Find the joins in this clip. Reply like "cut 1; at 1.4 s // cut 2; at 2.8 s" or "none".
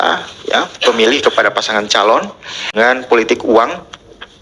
cut 1; at 2.6 s